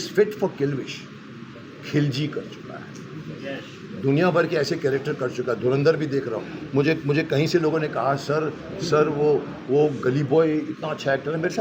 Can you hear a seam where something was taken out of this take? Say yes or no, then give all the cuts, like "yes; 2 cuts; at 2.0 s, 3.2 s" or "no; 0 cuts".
no; 0 cuts